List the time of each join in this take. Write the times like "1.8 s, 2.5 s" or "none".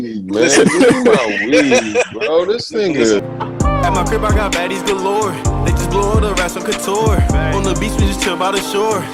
3.2 s